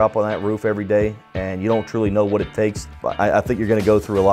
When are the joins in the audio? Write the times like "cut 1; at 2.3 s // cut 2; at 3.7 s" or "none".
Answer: cut 1; at 3.0 s